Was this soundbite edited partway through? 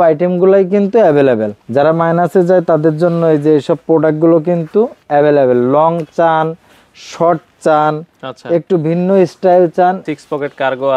yes; 2 cuts; at 1.6 s, 10.1 s

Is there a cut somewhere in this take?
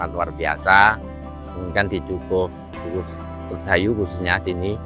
no; 0 cuts

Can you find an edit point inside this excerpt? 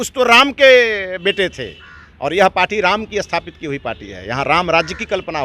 no; 0 cuts

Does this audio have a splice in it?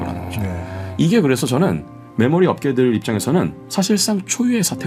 no; 0 cuts

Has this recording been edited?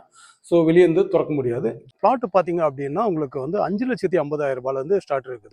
yes; 1 cut; at 1.9 s

